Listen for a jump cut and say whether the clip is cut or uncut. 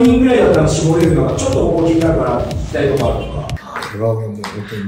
cut